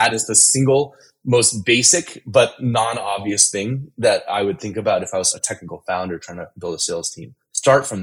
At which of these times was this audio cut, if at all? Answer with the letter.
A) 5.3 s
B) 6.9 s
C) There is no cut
A